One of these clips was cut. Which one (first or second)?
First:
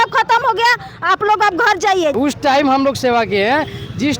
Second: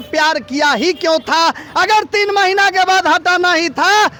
first